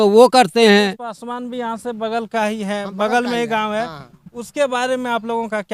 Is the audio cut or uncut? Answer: cut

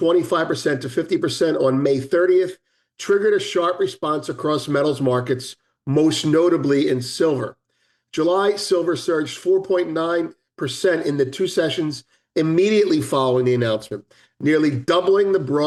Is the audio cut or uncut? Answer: uncut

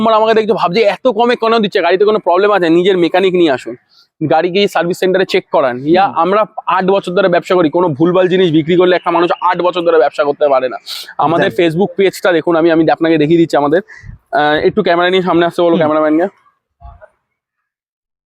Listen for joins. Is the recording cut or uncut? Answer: uncut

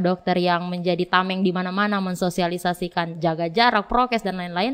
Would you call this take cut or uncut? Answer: uncut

